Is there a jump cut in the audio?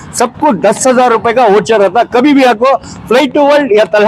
no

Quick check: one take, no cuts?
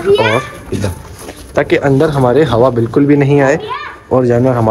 yes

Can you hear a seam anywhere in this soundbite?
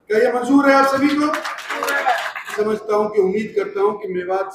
yes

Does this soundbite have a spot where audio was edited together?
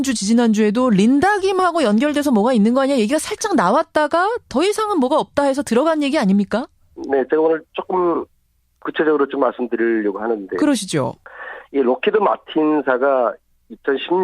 yes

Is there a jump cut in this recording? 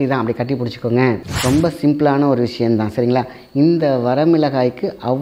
yes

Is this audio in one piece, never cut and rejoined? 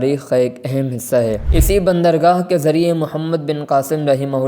no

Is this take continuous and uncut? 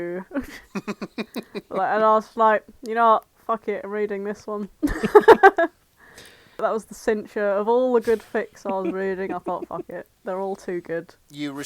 no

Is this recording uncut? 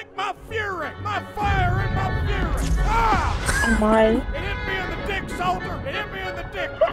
yes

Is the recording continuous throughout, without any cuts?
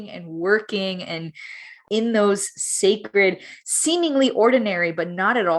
no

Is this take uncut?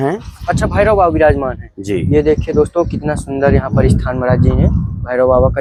yes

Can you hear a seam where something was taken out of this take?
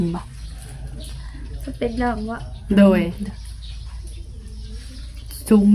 no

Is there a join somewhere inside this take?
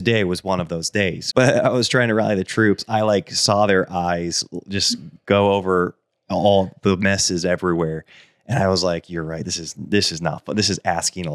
yes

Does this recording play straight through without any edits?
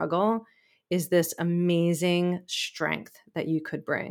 yes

